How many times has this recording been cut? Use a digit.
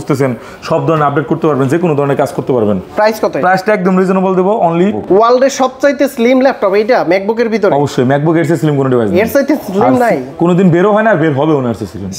1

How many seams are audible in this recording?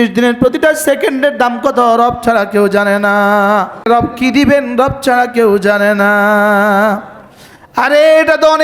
1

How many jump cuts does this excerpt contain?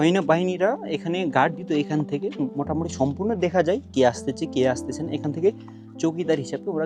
0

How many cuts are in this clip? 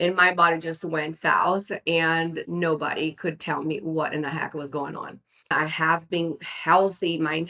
2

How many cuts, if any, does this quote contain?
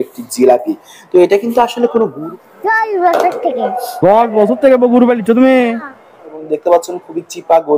2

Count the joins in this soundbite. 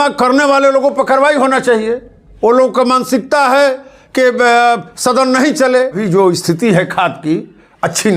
1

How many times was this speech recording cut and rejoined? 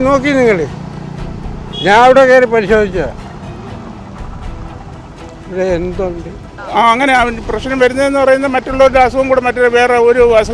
1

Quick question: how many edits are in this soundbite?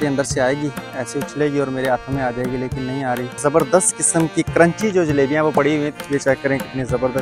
2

